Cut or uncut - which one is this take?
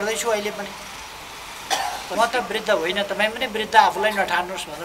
cut